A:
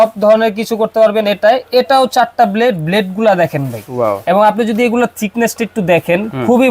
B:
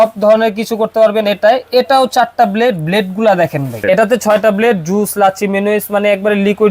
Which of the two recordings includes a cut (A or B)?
B